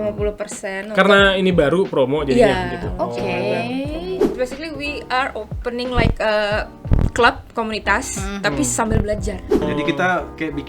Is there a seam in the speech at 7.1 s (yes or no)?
no